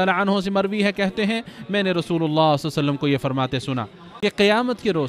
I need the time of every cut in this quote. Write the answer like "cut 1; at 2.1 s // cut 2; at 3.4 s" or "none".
cut 1; at 4.0 s